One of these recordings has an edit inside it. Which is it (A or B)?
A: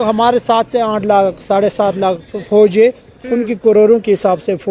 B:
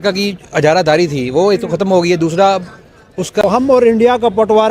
B